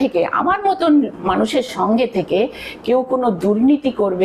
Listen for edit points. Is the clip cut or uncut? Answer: uncut